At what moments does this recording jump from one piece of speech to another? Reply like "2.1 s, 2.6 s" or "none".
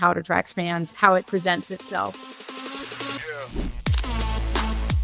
2.1 s